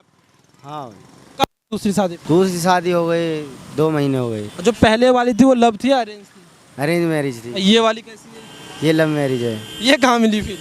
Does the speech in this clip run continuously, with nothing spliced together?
no; 2 cuts; at 2.2 s, 4.5 s

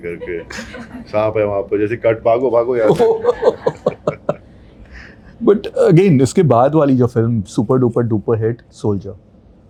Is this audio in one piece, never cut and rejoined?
yes; 0 cuts

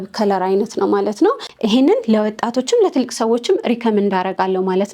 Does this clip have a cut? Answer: yes; 1 cut; at 1.5 s

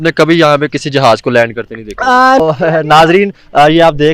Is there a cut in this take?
yes; 1 cut; at 2.4 s

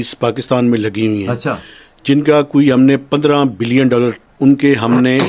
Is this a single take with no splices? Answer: no; 1 cut; at 4.3 s

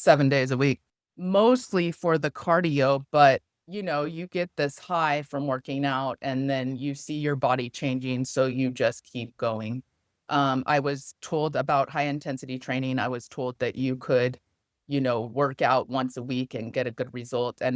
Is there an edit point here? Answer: yes; 1 cut; at 0.9 s

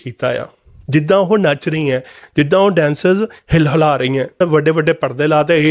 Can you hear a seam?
yes; 1 cut; at 4.4 s

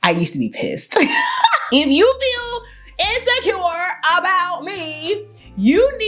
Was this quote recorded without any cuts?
no; 1 cut; at 1.6 s

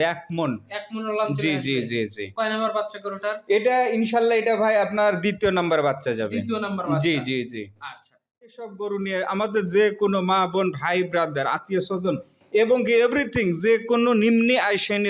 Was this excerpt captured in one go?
no; 1 cut; at 8.5 s

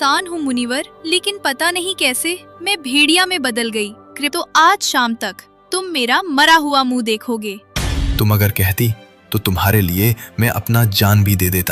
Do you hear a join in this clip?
yes; 2 cuts; at 4.2 s, 7.7 s

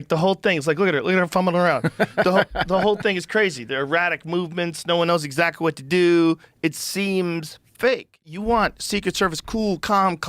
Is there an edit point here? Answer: yes; 1 cut; at 8.3 s

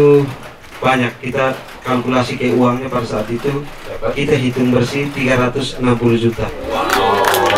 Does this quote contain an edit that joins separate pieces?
yes; 1 cut; at 6.5 s

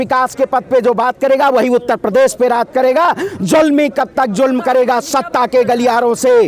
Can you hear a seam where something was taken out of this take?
no; 0 cuts

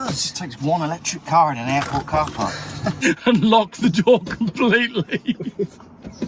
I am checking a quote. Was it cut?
yes; 1 cut; at 3.0 s

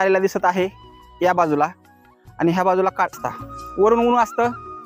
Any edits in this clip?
yes; 1 cut; at 3.2 s

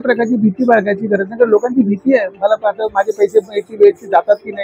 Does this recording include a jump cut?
no; 0 cuts

